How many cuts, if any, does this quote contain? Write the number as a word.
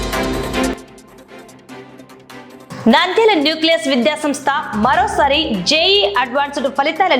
two